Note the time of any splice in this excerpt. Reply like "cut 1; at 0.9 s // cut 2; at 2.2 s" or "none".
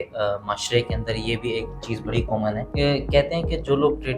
cut 1; at 2.7 s